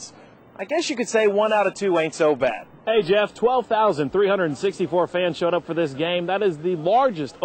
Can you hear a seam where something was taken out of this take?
yes; 1 cut; at 2.7 s

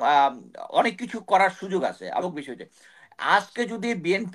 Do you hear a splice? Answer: yes; 1 cut; at 2.2 s

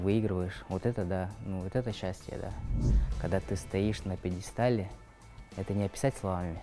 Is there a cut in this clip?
yes; 1 cut; at 2.8 s

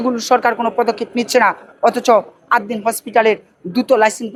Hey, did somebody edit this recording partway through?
no; 0 cuts

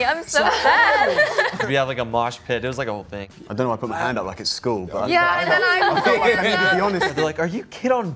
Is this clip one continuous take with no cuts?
no; 3 cuts; at 1.6 s, 3.1 s, 7.1 s

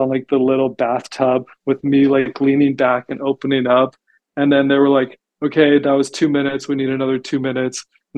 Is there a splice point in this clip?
no; 0 cuts

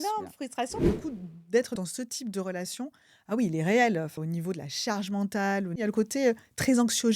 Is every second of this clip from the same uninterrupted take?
no; 4 cuts; at 0.8 s, 1.8 s, 4.2 s, 5.9 s

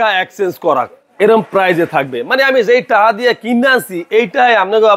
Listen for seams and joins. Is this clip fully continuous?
yes; 0 cuts

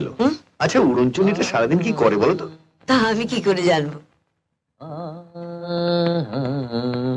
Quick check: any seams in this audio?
no; 0 cuts

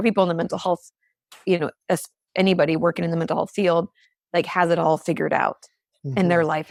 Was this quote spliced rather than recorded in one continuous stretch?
no; 0 cuts

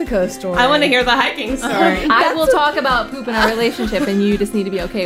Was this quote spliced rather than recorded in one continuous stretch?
yes; 1 cut; at 2.0 s

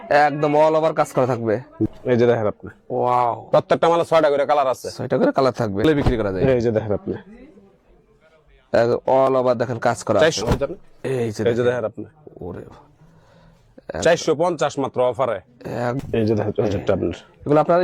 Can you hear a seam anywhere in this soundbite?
yes; 4 cuts; at 1.9 s, 5.8 s, 10.4 s, 16.0 s

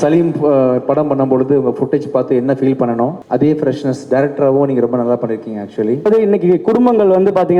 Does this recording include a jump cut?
yes; 2 cuts; at 3.2 s, 6.1 s

